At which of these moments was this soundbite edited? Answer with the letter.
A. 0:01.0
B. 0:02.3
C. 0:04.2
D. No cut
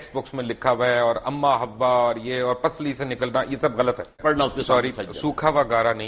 C